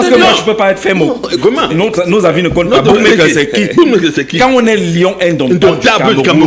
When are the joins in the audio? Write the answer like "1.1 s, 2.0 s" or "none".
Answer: none